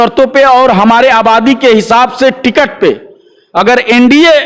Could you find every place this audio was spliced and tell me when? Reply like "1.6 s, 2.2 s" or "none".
none

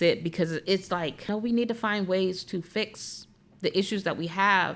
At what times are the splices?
1.2 s

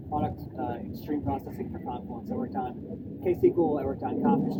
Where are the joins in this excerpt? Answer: none

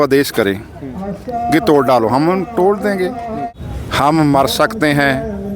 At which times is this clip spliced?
3.5 s

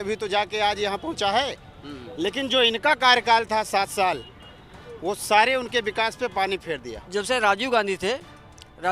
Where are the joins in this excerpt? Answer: 6.9 s

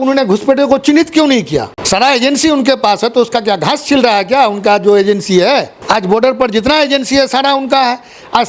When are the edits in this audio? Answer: 1.8 s, 5.7 s

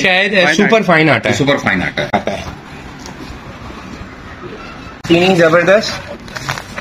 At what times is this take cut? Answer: 2.2 s, 5.0 s

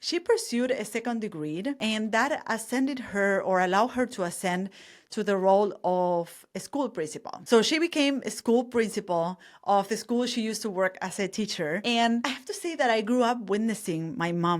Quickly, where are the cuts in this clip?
1.8 s, 12.2 s

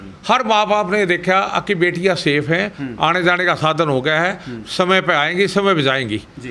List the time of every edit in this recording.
none

